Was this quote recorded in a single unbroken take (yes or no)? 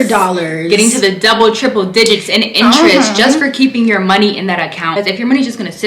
no